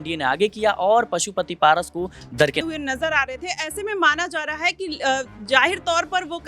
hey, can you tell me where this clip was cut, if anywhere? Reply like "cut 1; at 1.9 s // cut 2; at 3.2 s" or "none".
cut 1; at 2.6 s